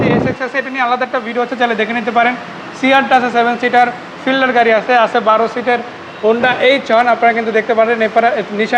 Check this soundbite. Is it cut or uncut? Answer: uncut